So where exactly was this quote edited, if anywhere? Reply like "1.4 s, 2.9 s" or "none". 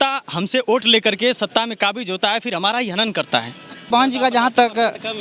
3.9 s